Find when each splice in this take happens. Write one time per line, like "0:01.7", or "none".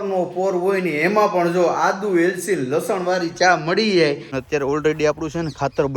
0:04.3